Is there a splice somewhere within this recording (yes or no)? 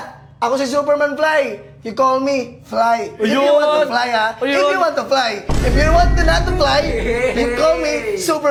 no